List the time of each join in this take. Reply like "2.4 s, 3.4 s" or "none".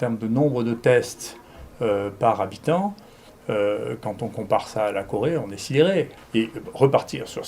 6.2 s